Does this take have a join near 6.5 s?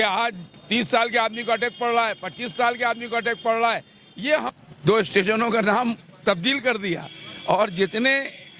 no; 1 cut; at 4.5 s

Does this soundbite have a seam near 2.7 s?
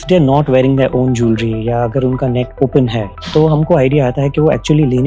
yes; 1 cut; at 2.7 s

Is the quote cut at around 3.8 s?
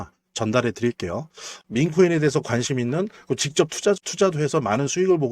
no; 1 cut; at 1.5 s

